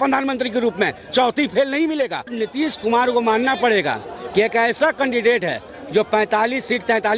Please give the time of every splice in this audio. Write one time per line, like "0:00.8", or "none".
0:02.4